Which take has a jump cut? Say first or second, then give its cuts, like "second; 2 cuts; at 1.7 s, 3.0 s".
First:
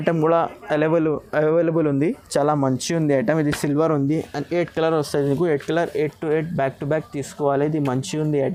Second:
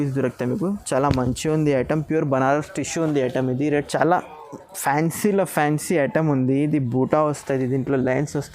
second; 1 cut; at 3.7 s